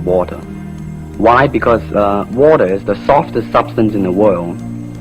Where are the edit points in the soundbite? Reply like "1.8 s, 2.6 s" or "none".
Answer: 1.2 s